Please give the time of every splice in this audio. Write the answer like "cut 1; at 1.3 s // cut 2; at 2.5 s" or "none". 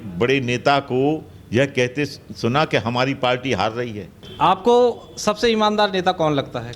cut 1; at 4.2 s